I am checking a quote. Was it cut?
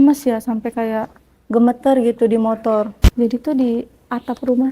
yes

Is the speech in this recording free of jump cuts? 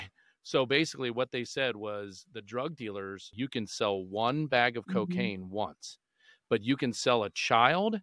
no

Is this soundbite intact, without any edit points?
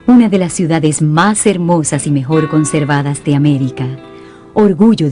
yes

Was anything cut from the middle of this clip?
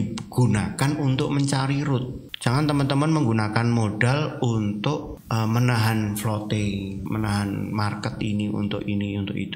yes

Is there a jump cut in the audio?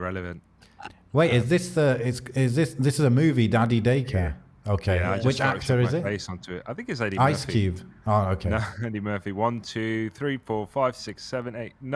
no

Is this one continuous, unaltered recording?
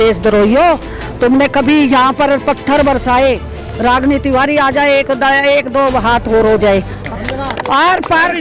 no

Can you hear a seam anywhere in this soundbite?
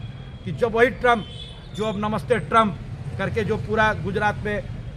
no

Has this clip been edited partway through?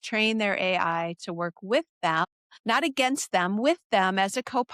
no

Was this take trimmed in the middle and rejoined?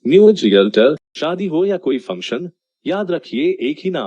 yes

